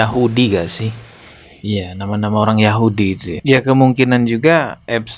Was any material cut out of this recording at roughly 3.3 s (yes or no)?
yes